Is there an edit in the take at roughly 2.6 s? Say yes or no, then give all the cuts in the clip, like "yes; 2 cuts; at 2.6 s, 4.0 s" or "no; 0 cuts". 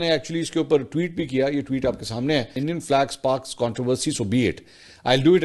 yes; 1 cut; at 2.6 s